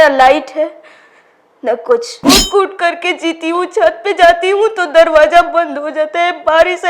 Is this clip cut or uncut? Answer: cut